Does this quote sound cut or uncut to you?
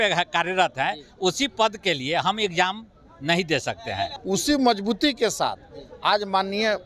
cut